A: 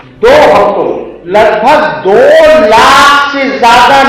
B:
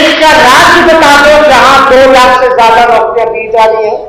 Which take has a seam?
A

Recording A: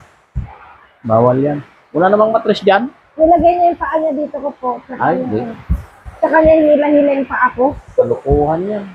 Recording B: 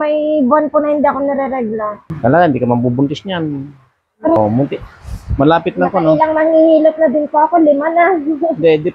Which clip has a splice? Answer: B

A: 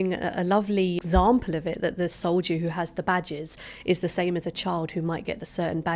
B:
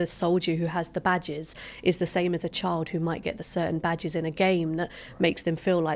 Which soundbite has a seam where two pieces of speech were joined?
A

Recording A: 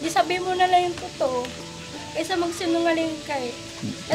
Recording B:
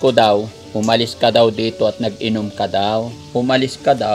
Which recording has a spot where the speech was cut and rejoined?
B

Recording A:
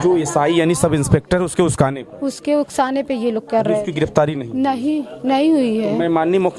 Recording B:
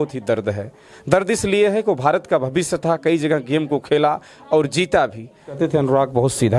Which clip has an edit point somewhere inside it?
B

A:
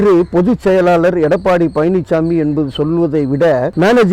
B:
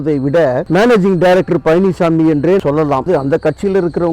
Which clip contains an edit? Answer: B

